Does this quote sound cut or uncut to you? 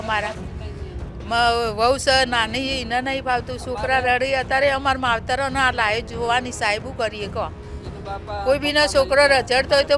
uncut